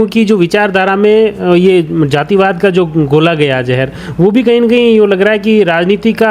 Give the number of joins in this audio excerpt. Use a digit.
0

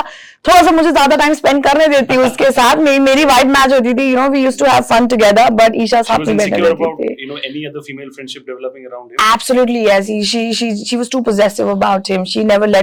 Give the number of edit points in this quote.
0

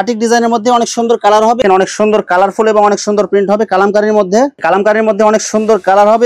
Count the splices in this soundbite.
2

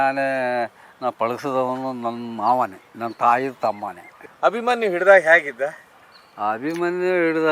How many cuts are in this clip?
1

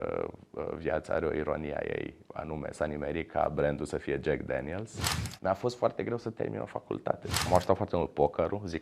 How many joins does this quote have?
2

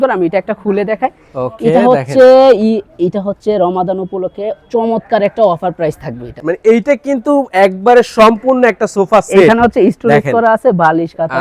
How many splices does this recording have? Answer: 1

